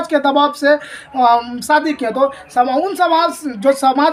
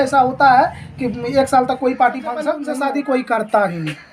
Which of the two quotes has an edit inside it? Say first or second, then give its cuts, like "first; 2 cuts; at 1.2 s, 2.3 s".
second; 1 cut; at 2.6 s